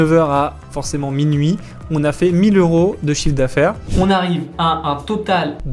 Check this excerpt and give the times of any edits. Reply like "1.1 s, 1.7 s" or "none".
3.8 s

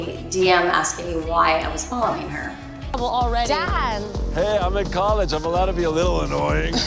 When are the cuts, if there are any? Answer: 2.8 s

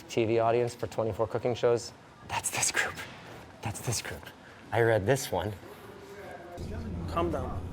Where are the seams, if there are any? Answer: 6.6 s

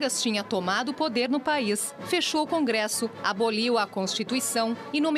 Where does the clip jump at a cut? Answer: 3.7 s

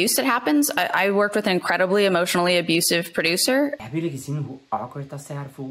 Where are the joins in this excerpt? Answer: 3.8 s

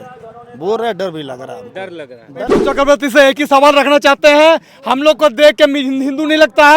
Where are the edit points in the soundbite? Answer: 2.6 s

